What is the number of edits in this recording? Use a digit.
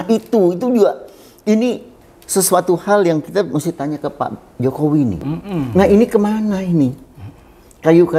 1